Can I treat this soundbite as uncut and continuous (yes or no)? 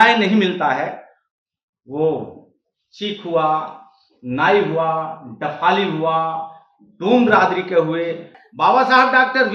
no